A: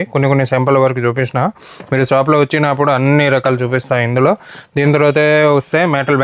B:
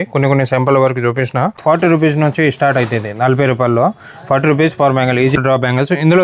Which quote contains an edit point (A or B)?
B